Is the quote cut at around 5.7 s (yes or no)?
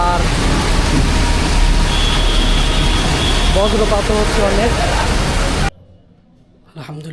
yes